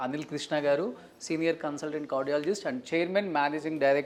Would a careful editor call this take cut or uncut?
uncut